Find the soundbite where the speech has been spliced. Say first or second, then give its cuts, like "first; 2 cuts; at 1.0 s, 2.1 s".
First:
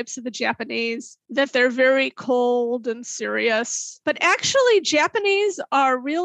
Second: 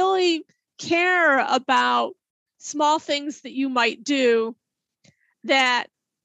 first; 2 cuts; at 1.2 s, 3.8 s